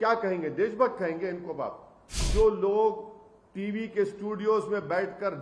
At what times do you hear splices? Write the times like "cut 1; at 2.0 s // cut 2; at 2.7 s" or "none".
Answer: cut 1; at 2.3 s